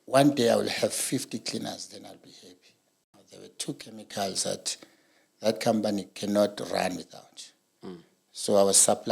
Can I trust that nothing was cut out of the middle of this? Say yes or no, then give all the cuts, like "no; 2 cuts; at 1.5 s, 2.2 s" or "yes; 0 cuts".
no; 1 cut; at 3.2 s